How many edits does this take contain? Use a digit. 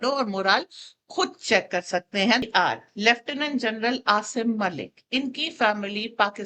1